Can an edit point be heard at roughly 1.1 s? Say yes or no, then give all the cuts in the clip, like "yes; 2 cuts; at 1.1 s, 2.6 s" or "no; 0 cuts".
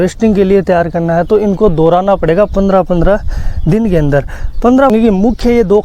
no; 1 cut; at 4.9 s